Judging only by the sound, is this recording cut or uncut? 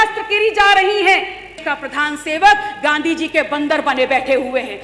cut